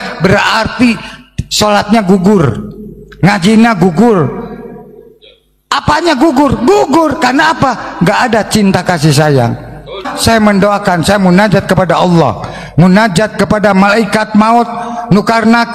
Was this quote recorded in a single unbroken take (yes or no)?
yes